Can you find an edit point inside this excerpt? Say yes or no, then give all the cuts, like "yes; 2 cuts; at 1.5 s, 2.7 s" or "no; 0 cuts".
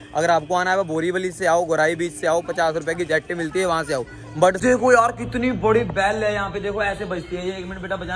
yes; 1 cut; at 4.6 s